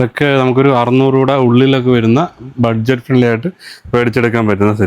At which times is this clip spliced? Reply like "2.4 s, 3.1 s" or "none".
none